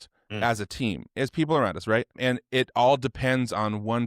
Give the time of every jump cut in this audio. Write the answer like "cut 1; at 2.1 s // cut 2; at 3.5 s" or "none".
cut 1; at 2.2 s